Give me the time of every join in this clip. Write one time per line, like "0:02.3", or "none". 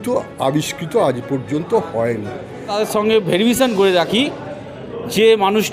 0:02.7